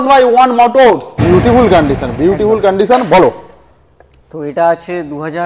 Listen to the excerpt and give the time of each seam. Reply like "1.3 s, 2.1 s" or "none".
1.2 s